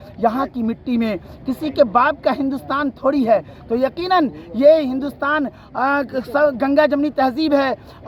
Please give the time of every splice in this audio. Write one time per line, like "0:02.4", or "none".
none